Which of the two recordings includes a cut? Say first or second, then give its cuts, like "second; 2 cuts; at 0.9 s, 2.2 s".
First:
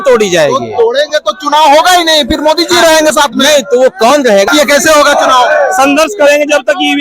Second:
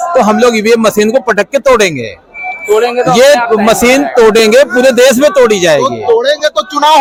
first; 1 cut; at 4.5 s